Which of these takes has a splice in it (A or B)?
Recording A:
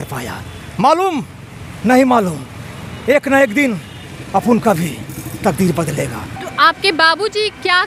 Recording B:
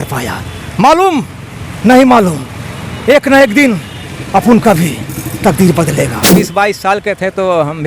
B